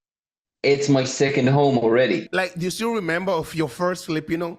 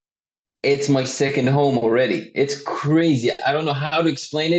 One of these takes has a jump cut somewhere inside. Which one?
first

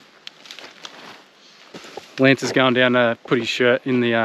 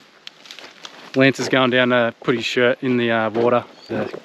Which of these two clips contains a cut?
second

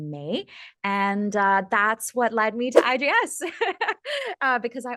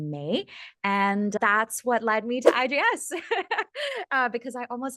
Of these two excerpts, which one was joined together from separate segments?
second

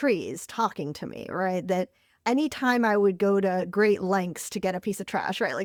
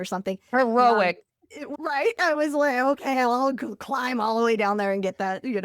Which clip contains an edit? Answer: second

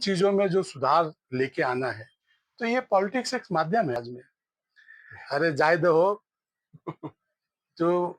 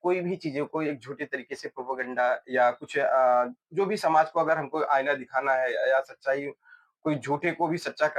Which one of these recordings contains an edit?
first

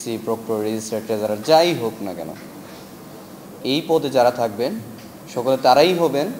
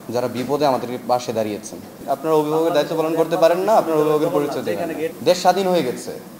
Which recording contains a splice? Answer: second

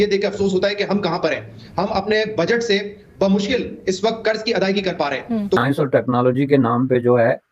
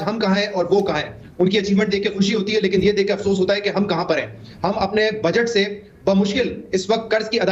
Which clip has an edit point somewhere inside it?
first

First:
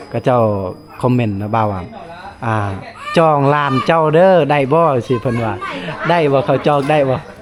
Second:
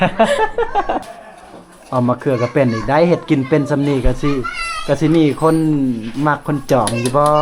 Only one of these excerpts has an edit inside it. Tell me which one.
second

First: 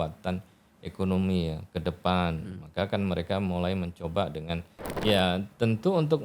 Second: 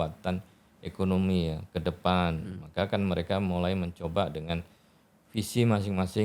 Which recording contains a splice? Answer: first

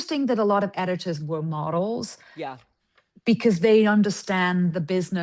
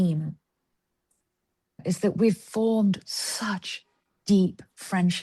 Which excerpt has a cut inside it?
second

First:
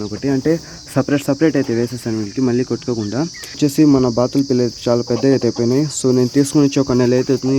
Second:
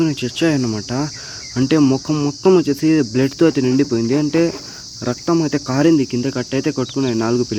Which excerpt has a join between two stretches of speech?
first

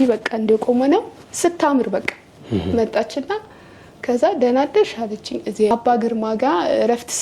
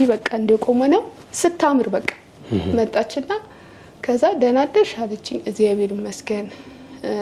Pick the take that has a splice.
first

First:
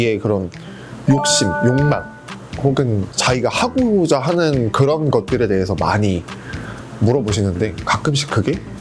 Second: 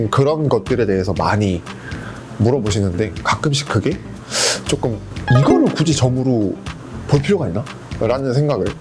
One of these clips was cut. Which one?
second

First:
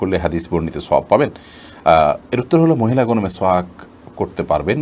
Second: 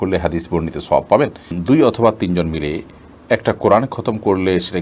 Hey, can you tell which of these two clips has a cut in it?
second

